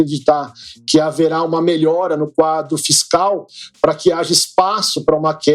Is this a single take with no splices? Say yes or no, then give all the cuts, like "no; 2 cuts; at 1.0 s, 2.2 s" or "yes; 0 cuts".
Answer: yes; 0 cuts